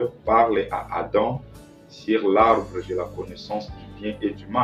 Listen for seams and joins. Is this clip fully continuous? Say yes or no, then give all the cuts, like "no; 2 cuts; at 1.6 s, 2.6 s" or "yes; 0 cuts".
yes; 0 cuts